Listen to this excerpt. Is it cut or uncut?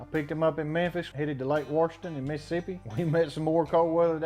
cut